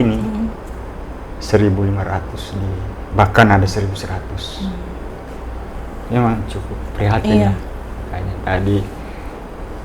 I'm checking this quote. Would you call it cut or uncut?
uncut